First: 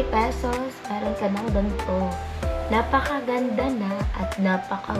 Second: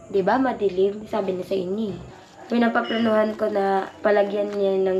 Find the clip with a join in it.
second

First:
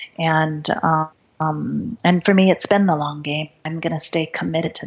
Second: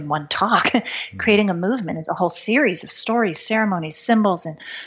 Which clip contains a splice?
first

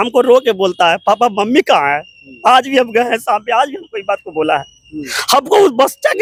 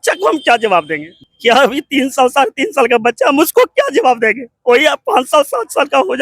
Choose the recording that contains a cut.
second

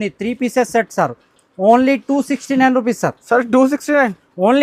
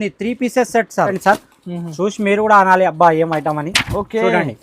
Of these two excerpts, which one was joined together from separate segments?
second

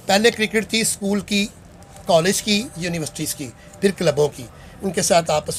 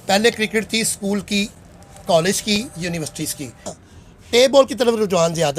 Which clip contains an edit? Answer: second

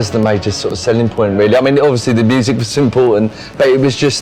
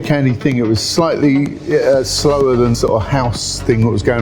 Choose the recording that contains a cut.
second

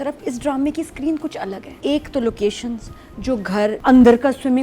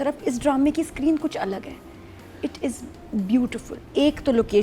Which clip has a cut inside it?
first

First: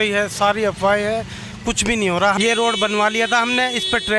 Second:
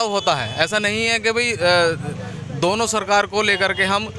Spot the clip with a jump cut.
first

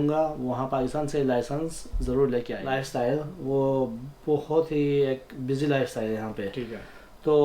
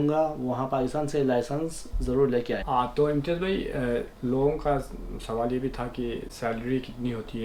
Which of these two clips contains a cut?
first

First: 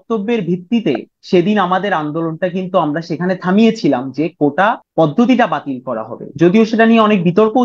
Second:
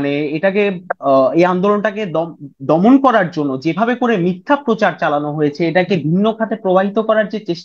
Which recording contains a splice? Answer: first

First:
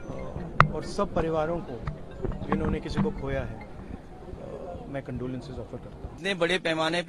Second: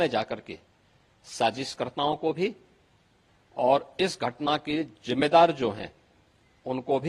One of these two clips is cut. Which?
first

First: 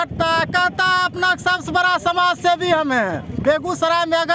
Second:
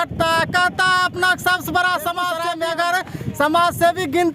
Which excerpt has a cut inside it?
second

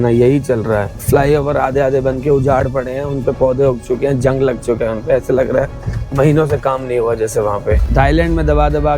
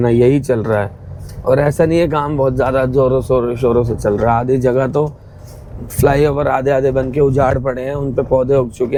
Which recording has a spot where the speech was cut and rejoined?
first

